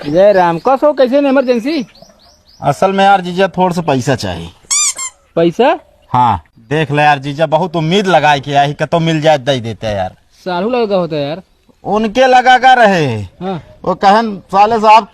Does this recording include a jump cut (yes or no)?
yes